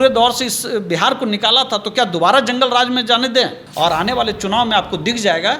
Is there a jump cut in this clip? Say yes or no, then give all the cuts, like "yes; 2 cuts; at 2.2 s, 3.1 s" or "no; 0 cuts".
yes; 1 cut; at 3.6 s